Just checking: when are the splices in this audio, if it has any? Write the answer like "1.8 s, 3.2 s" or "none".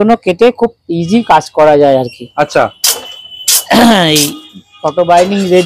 none